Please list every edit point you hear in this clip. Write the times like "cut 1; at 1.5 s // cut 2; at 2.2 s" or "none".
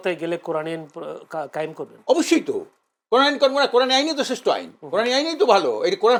none